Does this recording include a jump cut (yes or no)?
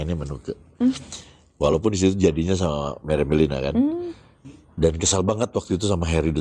no